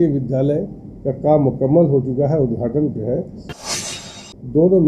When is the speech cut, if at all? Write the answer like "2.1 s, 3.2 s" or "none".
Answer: 3.8 s